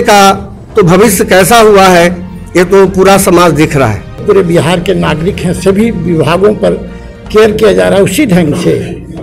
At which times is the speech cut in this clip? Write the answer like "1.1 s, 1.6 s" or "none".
4.2 s